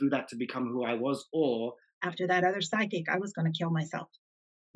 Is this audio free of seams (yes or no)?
no